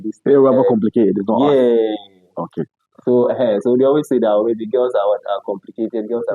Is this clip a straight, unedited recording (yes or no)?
yes